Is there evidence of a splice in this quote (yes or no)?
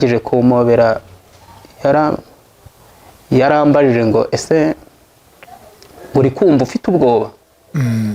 no